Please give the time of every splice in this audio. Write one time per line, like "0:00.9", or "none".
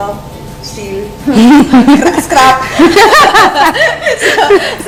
none